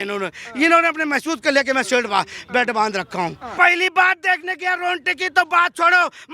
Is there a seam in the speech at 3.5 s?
yes; 1 cut; at 3.5 s

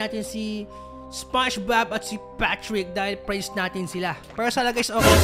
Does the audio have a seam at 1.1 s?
no; 0 cuts

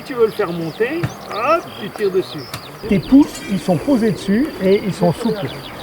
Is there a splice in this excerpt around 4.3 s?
no; 1 cut; at 2.8 s

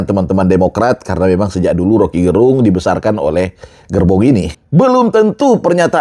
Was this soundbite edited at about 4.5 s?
yes; 1 cut; at 4.5 s

